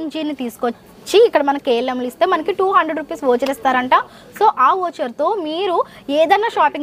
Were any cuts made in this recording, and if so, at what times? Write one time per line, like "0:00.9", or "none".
none